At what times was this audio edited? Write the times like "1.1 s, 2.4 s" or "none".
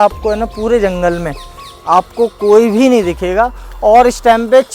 none